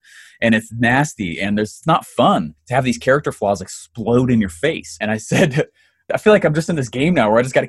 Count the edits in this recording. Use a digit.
4